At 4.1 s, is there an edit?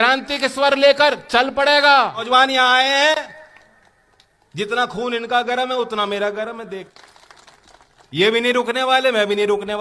no; 2 cuts; at 2.3 s, 6.9 s

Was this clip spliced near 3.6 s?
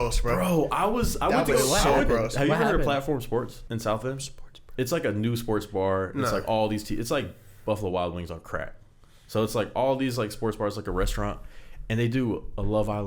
yes; 1 cut; at 3.6 s

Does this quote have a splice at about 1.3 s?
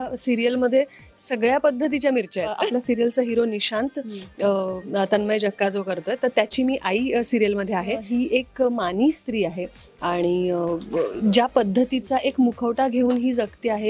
no; 2 cuts; at 2.6 s, 8.0 s

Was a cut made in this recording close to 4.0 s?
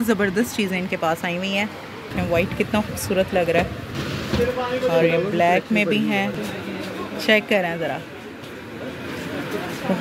yes; 3 cuts; at 2.1 s, 4.0 s, 6.4 s

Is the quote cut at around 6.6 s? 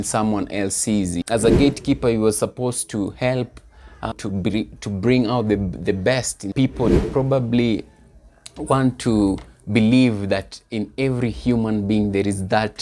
yes; 3 cuts; at 1.2 s, 4.1 s, 6.6 s

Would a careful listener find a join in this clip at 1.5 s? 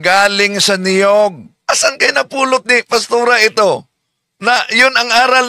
yes; 1 cut; at 1.5 s

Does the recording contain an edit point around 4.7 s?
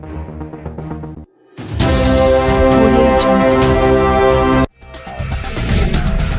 yes; 2 cuts; at 1.1 s, 4.7 s

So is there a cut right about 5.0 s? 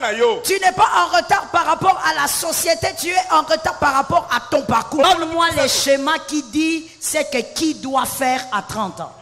yes; 1 cut; at 5.0 s

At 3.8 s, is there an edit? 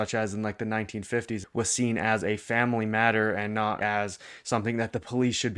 yes; 2 cuts; at 1.4 s, 3.8 s

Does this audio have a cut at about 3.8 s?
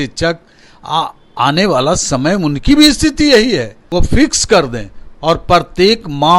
yes; 1 cut; at 3.8 s

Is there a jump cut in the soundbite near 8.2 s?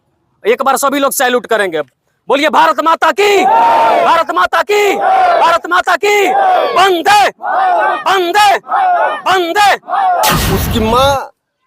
no; 1 cut; at 10.4 s

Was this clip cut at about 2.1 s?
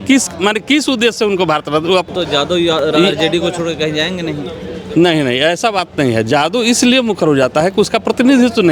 yes; 1 cut; at 2.1 s

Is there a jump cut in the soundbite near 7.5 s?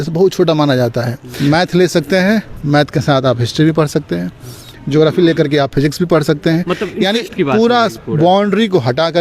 no; 1 cut; at 1.2 s

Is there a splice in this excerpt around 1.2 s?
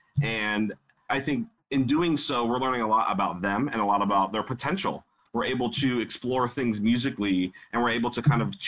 yes; 2 cuts; at 1.2 s, 5.1 s

